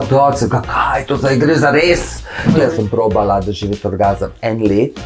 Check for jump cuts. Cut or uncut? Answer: cut